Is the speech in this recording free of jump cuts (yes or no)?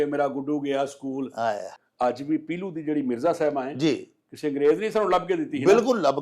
no